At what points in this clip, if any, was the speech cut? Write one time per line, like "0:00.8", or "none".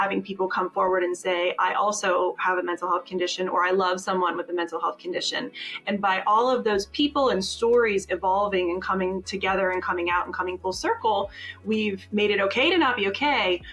none